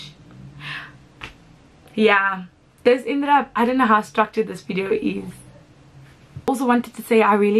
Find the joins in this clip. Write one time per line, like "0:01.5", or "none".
none